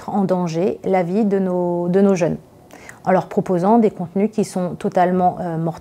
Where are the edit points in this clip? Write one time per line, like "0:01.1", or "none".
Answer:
none